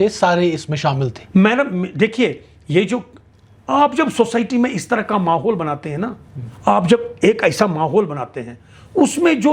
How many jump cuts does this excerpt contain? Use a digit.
0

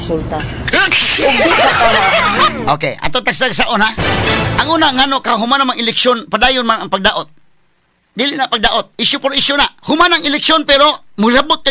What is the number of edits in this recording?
1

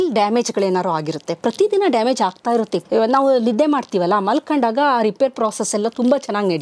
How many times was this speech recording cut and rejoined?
1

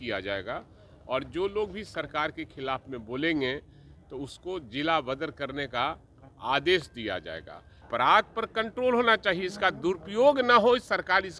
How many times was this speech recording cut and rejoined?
1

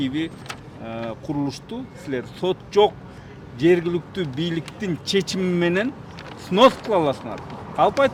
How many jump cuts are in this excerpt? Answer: 0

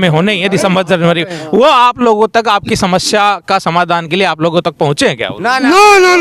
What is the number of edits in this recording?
0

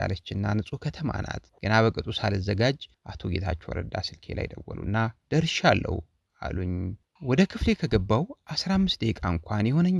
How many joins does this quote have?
1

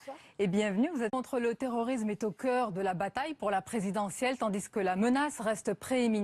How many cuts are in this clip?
0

